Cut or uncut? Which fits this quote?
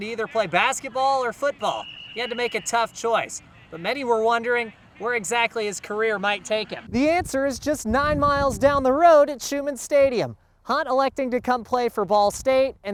uncut